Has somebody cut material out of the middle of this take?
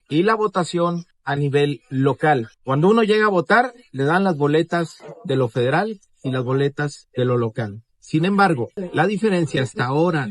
no; 0 cuts

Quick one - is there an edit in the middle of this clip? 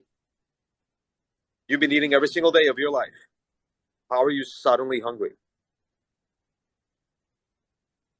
no; 0 cuts

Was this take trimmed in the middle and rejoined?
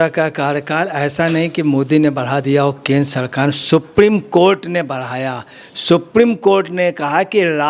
no; 0 cuts

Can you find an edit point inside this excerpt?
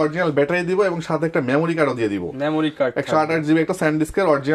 no; 0 cuts

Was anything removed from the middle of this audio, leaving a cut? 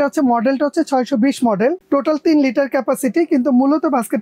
no; 0 cuts

